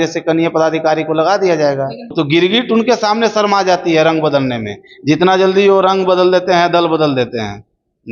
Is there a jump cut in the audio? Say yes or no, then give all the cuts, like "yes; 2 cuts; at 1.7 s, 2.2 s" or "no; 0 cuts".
yes; 1 cut; at 2.1 s